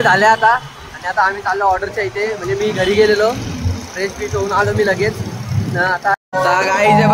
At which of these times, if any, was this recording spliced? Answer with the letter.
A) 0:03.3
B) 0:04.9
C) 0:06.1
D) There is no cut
C